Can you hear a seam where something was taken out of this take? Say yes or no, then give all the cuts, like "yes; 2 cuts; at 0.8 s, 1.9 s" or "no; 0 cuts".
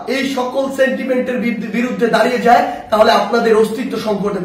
no; 0 cuts